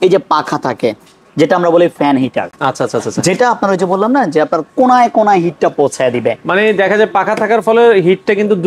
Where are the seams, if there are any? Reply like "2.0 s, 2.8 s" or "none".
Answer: none